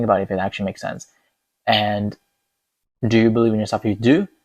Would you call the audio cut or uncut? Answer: uncut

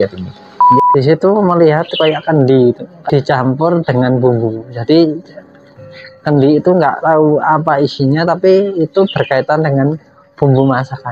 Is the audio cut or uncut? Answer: cut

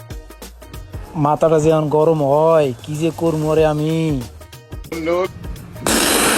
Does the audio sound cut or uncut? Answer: cut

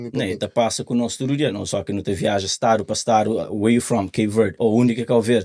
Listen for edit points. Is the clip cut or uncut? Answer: cut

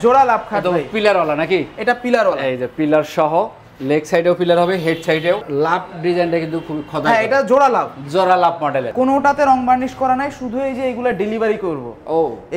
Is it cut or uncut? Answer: cut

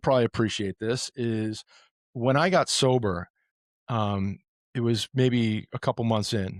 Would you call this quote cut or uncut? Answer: uncut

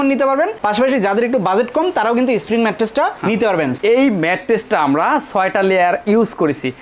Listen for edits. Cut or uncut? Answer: cut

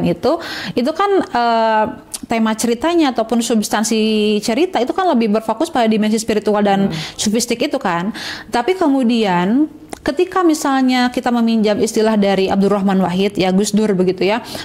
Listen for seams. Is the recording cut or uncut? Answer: uncut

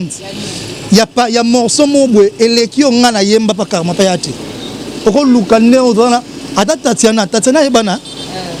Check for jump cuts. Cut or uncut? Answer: uncut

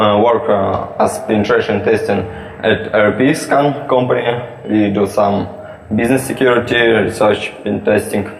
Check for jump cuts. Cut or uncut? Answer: cut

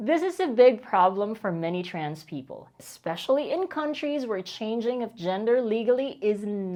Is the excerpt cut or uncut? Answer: uncut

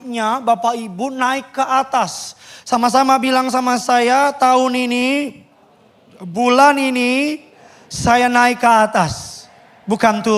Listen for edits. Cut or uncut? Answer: uncut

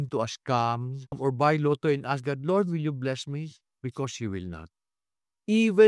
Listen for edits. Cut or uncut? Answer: uncut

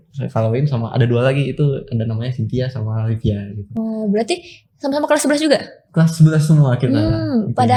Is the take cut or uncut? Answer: uncut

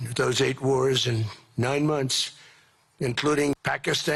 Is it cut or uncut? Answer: uncut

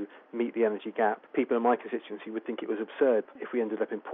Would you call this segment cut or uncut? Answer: uncut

